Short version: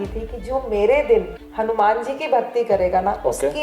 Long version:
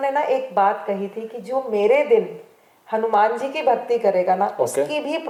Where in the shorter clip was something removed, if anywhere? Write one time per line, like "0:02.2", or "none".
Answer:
0:01.4

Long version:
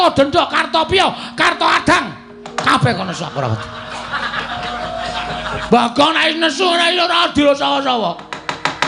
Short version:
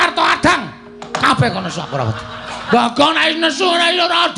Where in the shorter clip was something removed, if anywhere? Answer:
0:02.6

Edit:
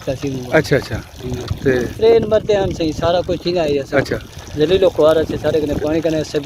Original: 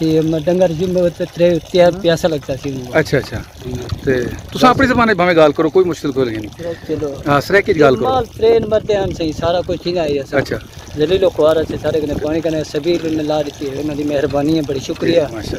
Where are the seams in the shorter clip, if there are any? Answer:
0:01.9

